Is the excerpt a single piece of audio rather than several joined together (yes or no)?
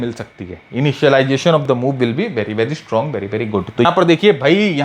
no